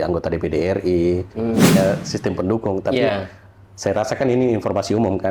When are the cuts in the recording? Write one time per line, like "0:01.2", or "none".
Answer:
0:01.8